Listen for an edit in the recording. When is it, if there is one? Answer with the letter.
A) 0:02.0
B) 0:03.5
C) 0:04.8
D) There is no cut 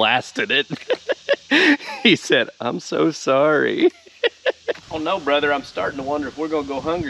C